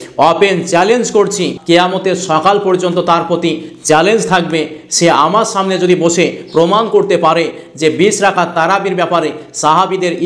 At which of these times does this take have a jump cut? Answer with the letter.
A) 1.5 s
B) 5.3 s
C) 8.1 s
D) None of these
A